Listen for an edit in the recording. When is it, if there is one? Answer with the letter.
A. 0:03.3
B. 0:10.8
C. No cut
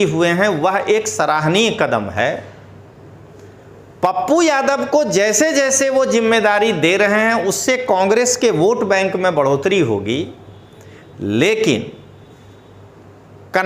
C